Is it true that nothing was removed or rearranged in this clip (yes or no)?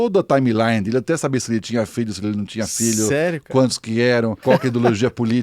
no